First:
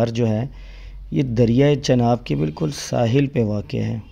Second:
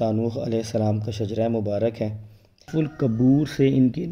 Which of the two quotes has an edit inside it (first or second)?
second